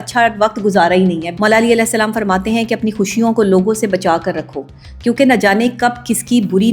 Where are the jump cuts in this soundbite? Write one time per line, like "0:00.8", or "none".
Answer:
0:01.3